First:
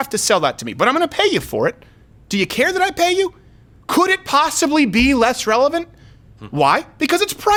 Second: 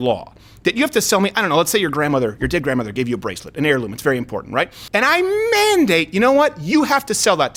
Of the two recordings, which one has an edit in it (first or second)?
second